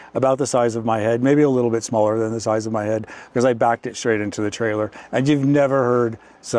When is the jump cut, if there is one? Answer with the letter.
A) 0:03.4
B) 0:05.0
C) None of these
C